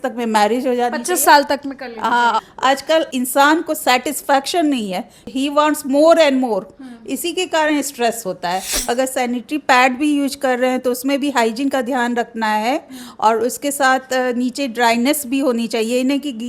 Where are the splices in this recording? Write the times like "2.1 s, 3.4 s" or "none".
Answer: 2.4 s, 5.2 s, 8.7 s